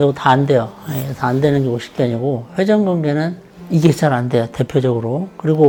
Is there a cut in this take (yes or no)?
no